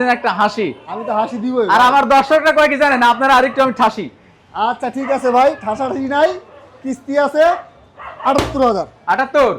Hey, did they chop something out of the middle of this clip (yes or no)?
no